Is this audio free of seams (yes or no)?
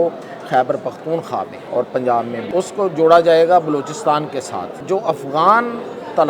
no